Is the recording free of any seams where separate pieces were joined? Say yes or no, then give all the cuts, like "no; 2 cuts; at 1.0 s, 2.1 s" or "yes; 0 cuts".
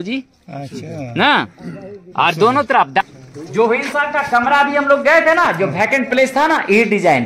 no; 1 cut; at 3.0 s